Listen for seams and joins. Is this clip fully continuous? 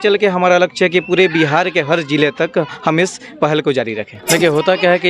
no; 1 cut; at 4.2 s

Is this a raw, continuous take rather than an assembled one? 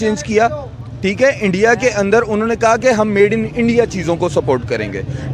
yes; 0 cuts

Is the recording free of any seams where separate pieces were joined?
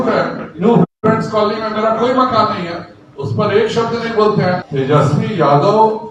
no; 1 cut; at 4.7 s

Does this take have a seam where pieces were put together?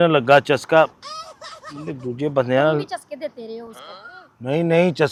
no; 0 cuts

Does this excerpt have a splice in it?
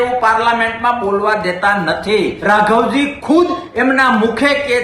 yes; 1 cut; at 2.4 s

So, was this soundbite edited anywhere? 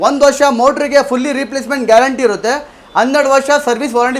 no; 0 cuts

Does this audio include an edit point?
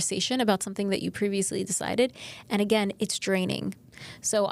no; 0 cuts

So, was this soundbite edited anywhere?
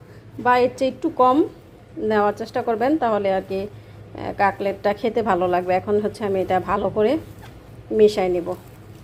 no; 0 cuts

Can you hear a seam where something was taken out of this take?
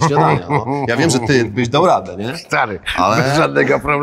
no; 0 cuts

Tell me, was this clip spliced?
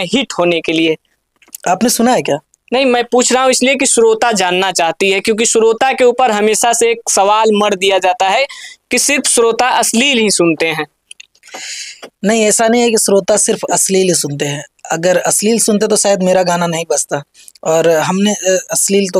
no; 0 cuts

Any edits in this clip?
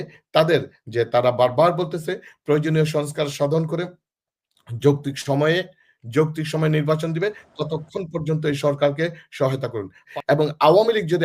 yes; 1 cut; at 10.0 s

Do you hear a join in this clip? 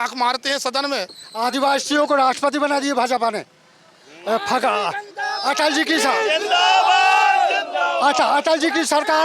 yes; 1 cut; at 1.2 s

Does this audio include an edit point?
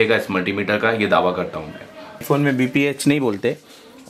yes; 1 cut; at 2.2 s

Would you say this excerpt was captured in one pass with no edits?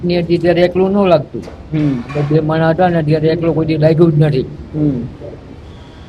yes; 0 cuts

